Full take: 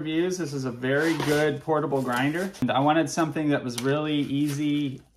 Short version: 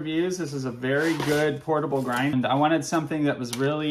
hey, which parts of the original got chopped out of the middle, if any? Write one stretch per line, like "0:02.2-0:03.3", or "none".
0:02.3-0:02.6